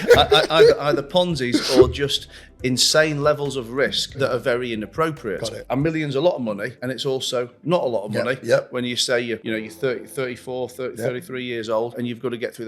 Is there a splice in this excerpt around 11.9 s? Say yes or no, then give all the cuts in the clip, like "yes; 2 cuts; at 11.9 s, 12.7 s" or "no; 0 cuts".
yes; 5 cuts; at 4.1 s, 5.6 s, 6.7 s, 9.4 s, 11.9 s